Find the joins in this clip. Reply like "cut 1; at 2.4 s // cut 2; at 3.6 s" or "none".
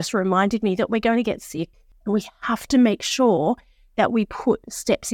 cut 1; at 1.9 s

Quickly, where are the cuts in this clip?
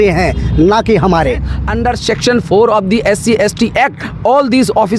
cut 1; at 1.8 s

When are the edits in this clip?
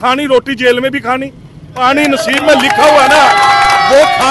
cut 1; at 1.7 s

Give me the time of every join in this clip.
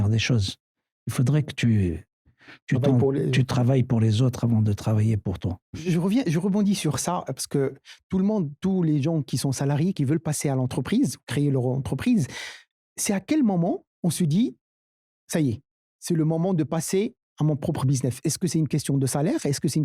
cut 1; at 5.7 s

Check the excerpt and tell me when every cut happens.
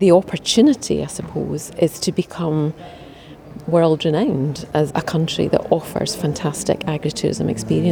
cut 1; at 4.9 s

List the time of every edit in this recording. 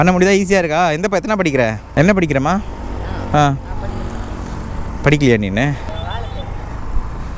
cut 1; at 1.8 s // cut 2; at 5.9 s

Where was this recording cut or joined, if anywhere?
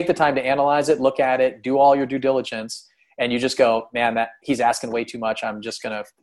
none

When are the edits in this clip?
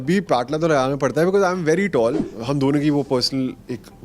cut 1; at 2.3 s

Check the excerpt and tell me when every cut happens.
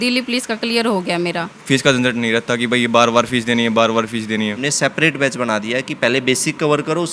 cut 1; at 1.5 s // cut 2; at 4.7 s

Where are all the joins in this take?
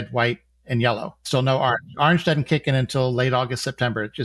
cut 1; at 1.2 s

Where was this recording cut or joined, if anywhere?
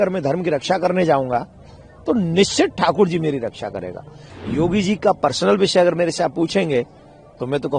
cut 1; at 4.2 s

